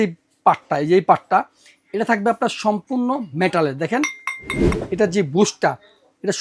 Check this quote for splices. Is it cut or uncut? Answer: cut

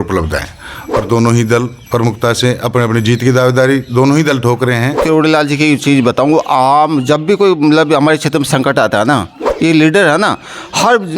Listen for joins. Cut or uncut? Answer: cut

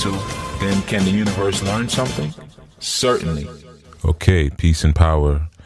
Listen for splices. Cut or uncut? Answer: uncut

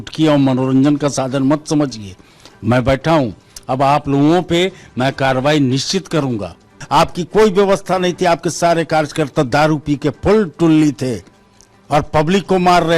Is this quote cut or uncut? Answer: cut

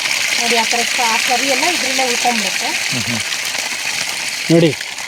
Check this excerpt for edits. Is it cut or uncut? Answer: uncut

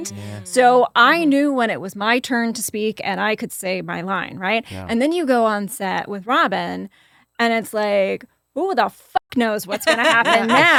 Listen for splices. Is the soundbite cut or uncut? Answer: uncut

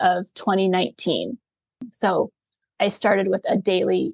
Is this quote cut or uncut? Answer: cut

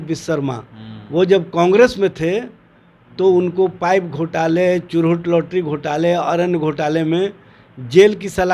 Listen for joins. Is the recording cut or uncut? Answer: uncut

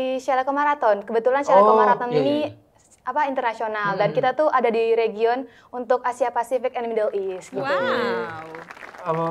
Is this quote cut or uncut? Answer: uncut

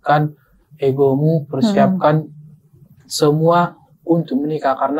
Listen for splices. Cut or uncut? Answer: uncut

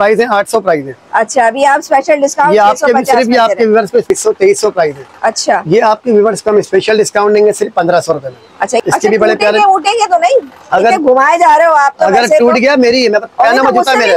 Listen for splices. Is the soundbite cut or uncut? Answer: cut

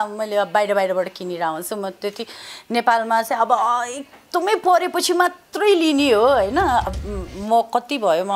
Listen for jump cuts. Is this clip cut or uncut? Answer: cut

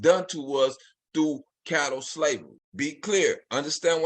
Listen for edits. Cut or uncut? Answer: cut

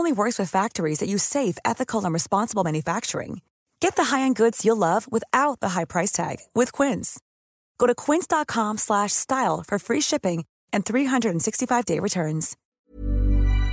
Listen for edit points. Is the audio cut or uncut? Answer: cut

